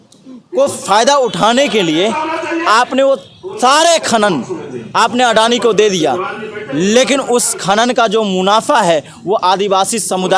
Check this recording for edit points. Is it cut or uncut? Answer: uncut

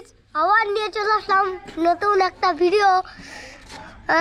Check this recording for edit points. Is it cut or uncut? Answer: uncut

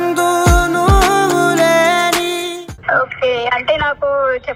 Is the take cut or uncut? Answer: cut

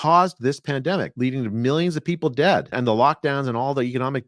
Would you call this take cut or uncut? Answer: cut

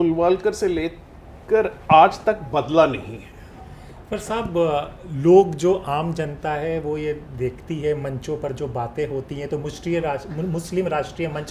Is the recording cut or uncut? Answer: uncut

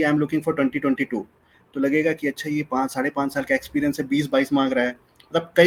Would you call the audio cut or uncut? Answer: uncut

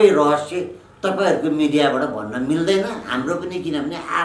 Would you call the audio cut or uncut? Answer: uncut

